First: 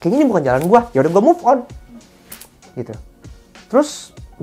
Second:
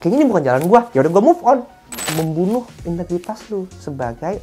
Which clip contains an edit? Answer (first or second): second